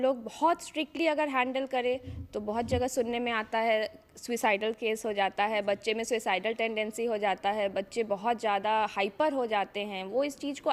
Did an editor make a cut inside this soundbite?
no; 0 cuts

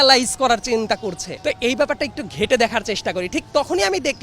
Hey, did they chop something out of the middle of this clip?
yes; 1 cut; at 1.3 s

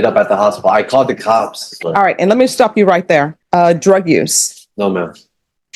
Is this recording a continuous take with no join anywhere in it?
no; 2 cuts; at 1.7 s, 3.4 s

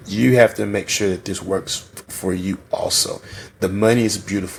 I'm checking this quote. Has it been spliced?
no; 0 cuts

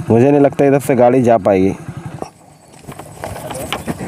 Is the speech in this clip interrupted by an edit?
yes; 1 cut; at 2.3 s

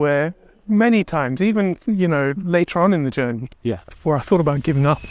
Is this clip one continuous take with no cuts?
yes; 0 cuts

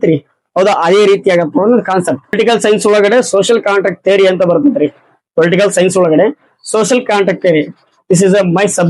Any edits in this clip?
yes; 1 cut; at 2.4 s

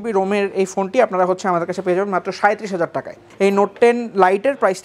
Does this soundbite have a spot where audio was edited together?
yes; 1 cut; at 3.2 s

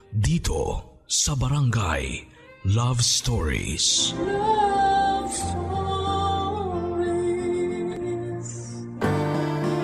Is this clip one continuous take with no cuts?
no; 1 cut; at 8.9 s

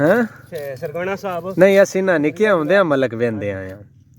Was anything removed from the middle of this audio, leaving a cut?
no; 0 cuts

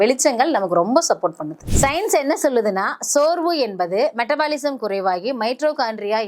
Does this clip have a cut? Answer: yes; 1 cut; at 1.5 s

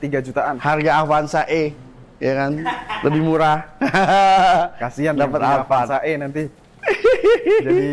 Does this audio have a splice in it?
no; 0 cuts

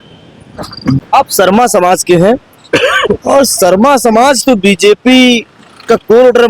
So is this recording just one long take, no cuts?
no; 1 cut; at 1.0 s

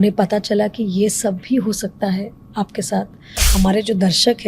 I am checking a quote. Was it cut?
yes; 1 cut; at 3.4 s

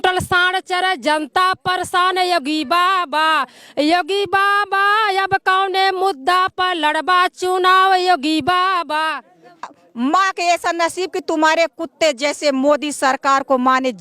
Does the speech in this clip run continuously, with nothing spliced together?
no; 1 cut; at 9.7 s

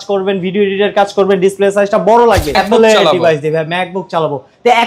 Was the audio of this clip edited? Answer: yes; 1 cut; at 2.5 s

